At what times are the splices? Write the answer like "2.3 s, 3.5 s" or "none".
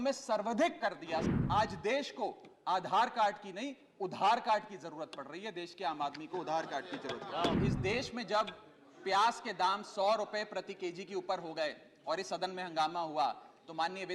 1.2 s, 7.5 s